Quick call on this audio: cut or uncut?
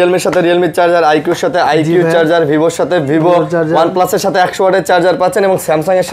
uncut